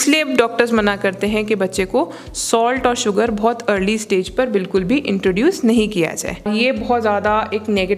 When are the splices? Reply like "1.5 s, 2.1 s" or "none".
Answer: 6.5 s